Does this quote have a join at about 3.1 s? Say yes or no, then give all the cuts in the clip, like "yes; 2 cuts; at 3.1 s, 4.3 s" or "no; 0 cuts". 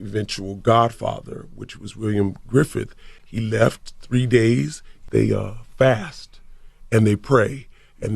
yes; 2 cuts; at 3.1 s, 5.0 s